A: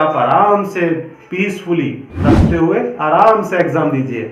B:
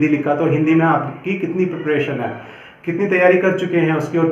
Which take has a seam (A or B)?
A